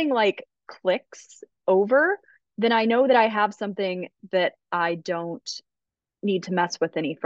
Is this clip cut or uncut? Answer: uncut